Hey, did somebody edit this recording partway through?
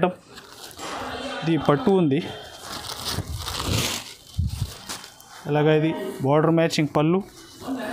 no; 0 cuts

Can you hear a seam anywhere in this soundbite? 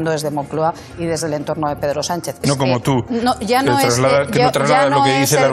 yes; 1 cut; at 2.4 s

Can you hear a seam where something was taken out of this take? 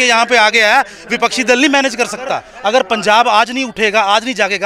yes; 1 cut; at 2.5 s

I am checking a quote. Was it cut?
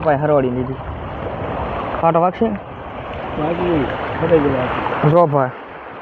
no; 0 cuts

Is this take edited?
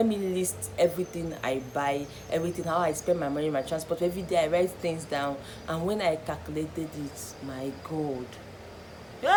no; 0 cuts

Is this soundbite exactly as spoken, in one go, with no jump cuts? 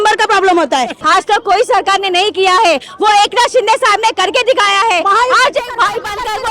no; 1 cut; at 1.0 s

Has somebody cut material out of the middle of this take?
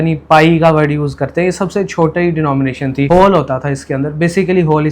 yes; 1 cut; at 3.1 s

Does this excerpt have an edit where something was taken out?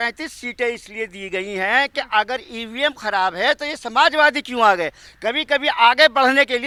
no; 0 cuts

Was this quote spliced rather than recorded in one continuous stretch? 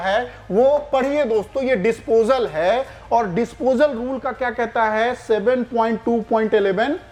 no; 0 cuts

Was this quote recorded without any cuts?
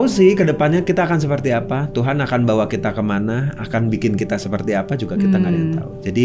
yes; 0 cuts

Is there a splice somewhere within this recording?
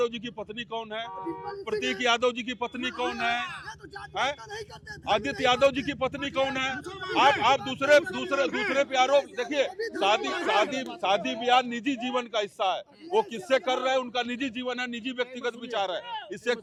no; 0 cuts

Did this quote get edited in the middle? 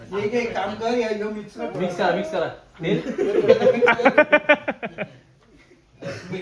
no; 0 cuts

